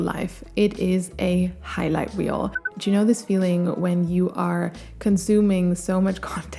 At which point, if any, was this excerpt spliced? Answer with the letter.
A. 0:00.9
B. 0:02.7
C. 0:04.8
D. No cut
B